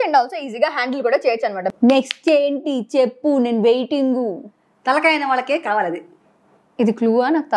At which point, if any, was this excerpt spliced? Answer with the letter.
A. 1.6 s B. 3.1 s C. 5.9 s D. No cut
A